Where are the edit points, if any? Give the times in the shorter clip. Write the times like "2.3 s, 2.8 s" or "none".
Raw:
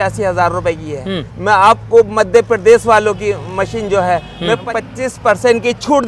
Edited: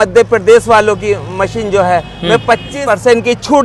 2.7 s